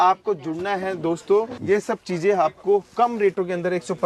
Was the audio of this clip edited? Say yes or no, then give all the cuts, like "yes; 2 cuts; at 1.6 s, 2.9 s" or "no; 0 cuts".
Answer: yes; 1 cut; at 1.6 s